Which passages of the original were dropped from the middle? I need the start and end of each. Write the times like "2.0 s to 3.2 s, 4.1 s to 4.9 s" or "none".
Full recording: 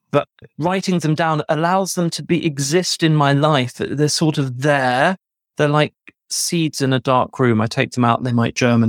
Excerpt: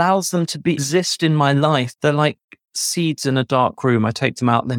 2.4 s to 2.6 s, 3.7 s to 5.5 s